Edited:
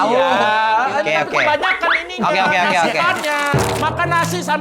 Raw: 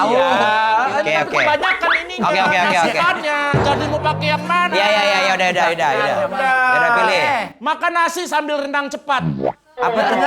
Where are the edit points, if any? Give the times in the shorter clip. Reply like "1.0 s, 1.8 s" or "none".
3.7 s